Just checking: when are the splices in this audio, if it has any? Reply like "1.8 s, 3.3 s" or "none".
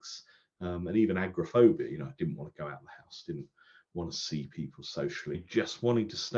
5.4 s

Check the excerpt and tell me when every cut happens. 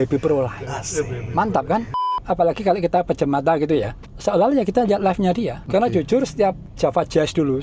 2.0 s, 5.6 s, 6.7 s

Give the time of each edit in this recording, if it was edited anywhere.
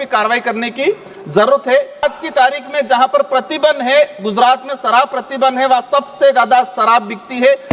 2.0 s

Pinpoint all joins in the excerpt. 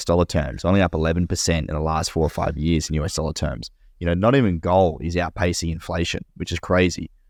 none

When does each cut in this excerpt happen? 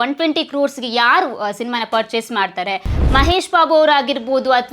2.9 s

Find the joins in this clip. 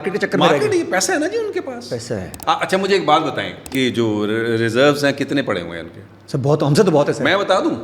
2.3 s, 3.7 s

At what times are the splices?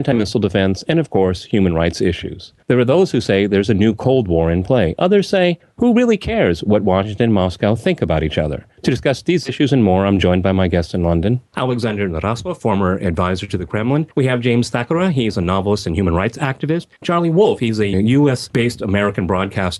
11.8 s

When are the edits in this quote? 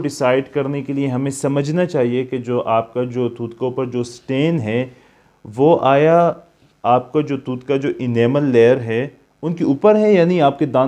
none

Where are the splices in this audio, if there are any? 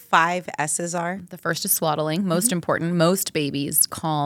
1.2 s

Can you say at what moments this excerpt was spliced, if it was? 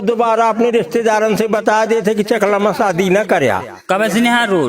3.7 s

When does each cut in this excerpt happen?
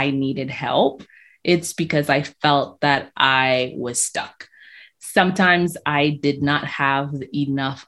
none

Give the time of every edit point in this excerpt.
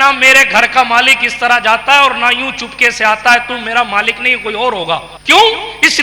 5.1 s

